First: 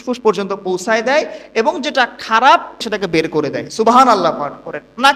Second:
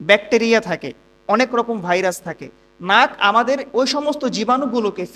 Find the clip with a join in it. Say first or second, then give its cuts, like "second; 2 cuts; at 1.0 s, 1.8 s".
first; 1 cut; at 2.7 s